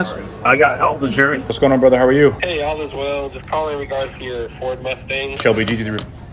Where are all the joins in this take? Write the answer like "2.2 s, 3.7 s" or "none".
1.5 s, 2.4 s, 5.4 s